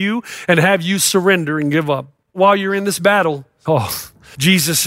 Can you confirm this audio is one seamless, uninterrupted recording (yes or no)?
no